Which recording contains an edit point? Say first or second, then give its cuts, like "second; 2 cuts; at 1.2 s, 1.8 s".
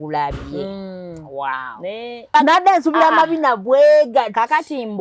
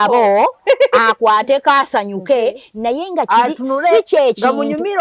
first; 1 cut; at 2.3 s